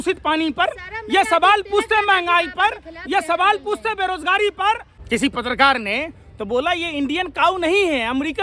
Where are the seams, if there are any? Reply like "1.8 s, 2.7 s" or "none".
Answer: 4.9 s